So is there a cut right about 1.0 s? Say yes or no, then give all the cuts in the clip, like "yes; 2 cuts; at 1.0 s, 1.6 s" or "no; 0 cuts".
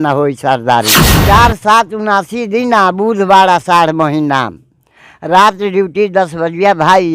yes; 1 cut; at 1.0 s